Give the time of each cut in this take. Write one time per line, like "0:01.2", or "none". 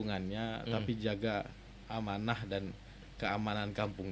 none